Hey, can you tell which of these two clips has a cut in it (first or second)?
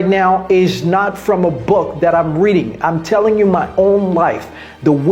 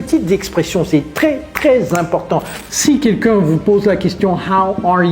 second